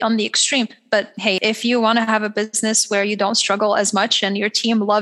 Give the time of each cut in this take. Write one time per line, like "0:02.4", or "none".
0:01.2